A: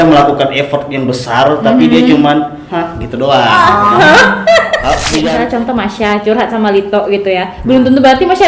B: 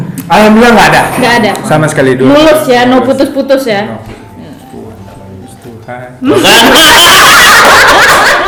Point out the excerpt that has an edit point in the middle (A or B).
A